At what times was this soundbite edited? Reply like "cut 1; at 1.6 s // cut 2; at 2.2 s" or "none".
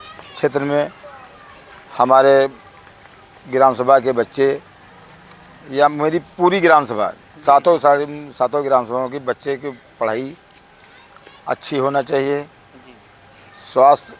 none